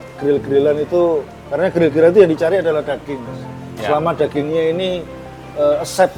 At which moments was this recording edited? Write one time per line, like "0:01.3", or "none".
none